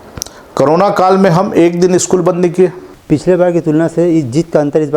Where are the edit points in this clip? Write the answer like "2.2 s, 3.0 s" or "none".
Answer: 2.9 s